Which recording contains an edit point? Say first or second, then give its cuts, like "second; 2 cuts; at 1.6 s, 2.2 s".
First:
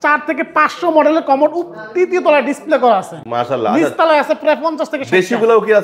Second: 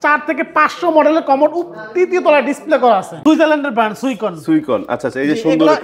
second; 1 cut; at 3.1 s